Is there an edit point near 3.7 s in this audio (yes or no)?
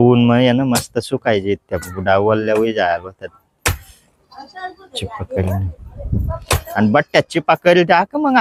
no